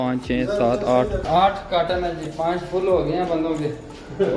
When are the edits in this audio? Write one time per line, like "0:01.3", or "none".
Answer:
0:01.2